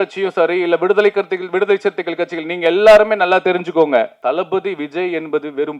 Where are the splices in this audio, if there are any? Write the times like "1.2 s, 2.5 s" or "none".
4.1 s